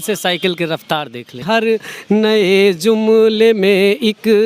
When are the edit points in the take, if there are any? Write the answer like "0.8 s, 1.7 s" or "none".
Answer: 1.4 s